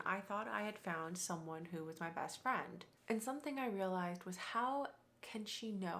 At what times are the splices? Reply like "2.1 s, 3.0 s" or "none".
2.8 s